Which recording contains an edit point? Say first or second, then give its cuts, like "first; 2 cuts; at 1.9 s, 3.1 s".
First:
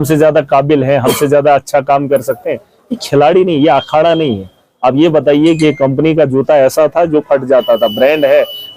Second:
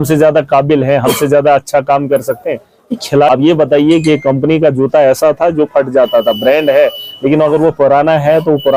second; 1 cut; at 3.3 s